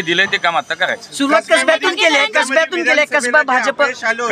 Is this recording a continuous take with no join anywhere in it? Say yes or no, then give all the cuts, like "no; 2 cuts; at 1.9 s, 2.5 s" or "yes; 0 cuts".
yes; 0 cuts